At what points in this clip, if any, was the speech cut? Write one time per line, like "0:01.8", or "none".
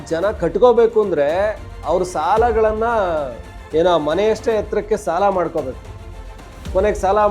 none